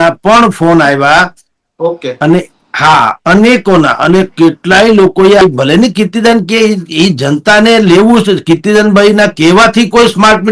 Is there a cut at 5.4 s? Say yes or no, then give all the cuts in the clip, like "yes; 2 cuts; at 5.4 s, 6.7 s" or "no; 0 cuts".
yes; 1 cut; at 5.4 s